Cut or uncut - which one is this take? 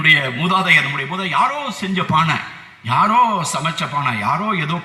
uncut